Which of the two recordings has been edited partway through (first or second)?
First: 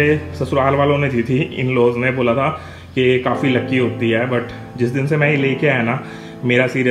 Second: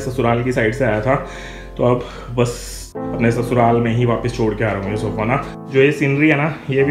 second